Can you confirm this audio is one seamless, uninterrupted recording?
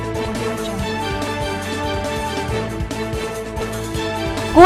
yes; 0 cuts

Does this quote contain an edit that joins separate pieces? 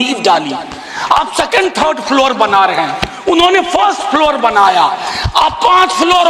no; 0 cuts

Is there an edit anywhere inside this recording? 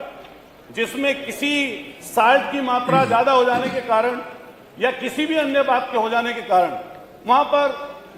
no; 0 cuts

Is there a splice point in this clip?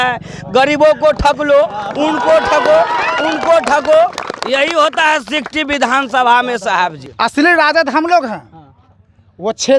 yes; 1 cut; at 7.0 s

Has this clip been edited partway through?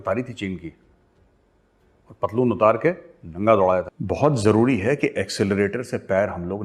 yes; 1 cut; at 4.0 s

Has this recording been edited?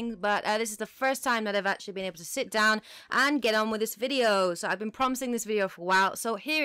no; 0 cuts

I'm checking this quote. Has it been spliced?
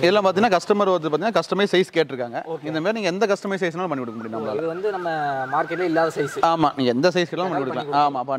no; 0 cuts

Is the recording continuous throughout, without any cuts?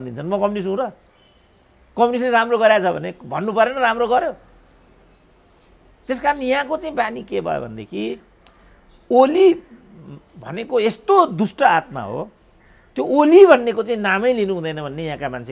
yes; 0 cuts

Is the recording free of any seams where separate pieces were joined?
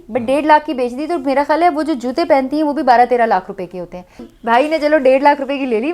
no; 1 cut; at 4.3 s

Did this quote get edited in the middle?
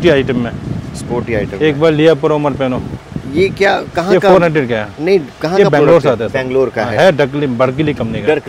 no; 0 cuts

